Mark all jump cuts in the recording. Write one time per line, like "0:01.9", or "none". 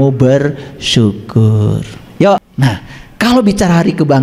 0:02.4